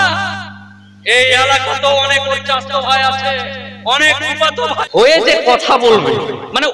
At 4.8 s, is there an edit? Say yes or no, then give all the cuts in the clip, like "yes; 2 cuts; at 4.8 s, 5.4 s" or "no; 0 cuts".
yes; 1 cut; at 4.8 s